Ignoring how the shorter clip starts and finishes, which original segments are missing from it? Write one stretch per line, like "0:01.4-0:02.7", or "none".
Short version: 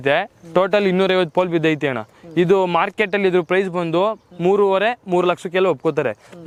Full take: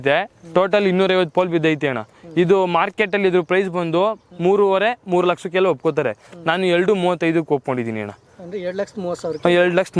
none